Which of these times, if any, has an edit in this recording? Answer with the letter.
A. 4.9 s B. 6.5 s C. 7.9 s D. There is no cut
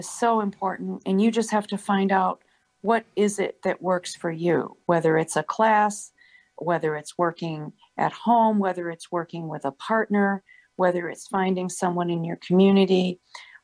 B